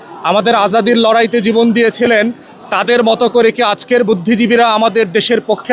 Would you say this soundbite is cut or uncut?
uncut